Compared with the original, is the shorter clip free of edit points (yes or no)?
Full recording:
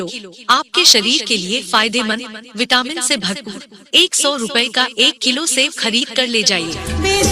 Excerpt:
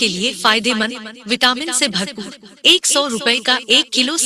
yes